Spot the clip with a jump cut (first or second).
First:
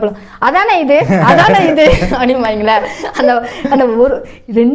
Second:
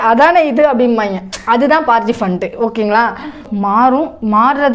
second